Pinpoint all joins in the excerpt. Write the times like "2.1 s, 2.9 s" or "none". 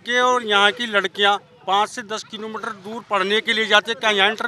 none